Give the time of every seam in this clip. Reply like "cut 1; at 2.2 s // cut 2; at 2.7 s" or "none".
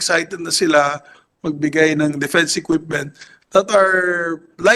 none

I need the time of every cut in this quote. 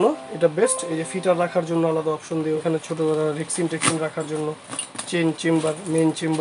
cut 1; at 2.6 s

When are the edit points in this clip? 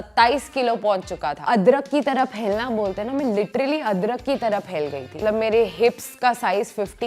cut 1; at 1.4 s // cut 2; at 5.2 s

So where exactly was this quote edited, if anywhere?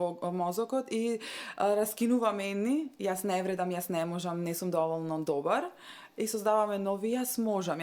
none

